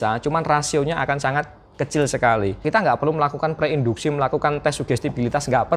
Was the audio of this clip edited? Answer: yes; 1 cut; at 2.6 s

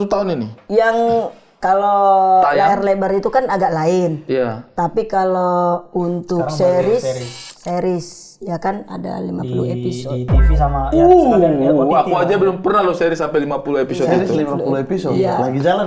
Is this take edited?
no; 0 cuts

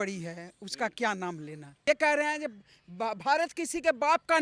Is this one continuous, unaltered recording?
no; 1 cut; at 1.7 s

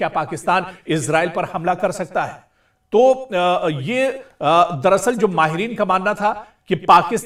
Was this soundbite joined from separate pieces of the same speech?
no; 0 cuts

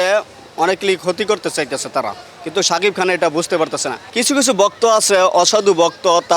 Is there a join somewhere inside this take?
yes; 1 cut; at 4.0 s

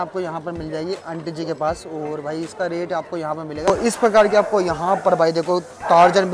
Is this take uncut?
no; 1 cut; at 3.6 s

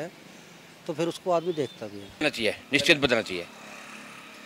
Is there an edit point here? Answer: yes; 1 cut; at 2.2 s

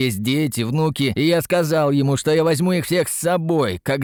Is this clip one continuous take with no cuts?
yes; 0 cuts

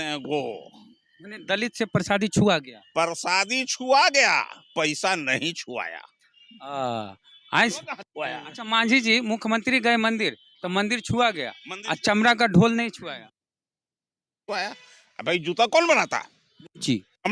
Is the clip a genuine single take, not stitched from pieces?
yes; 0 cuts

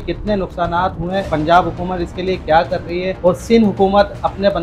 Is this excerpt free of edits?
no; 2 cuts; at 1.3 s, 3.1 s

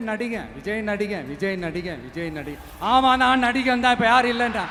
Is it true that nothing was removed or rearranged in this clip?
yes; 0 cuts

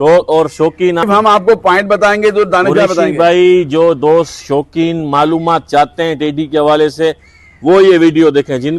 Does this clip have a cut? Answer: yes; 1 cut; at 1.0 s

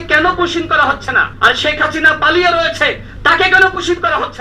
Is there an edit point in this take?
yes; 1 cut; at 1.2 s

